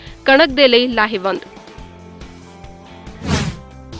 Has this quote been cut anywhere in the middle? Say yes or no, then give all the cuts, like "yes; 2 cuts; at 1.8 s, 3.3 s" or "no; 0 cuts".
no; 0 cuts